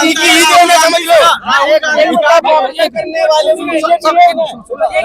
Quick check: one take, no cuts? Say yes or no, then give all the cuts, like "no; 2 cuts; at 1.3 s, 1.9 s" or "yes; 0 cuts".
yes; 0 cuts